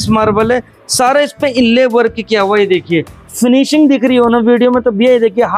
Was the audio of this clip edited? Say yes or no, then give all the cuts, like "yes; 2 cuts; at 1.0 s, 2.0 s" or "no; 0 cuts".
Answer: yes; 1 cut; at 3.2 s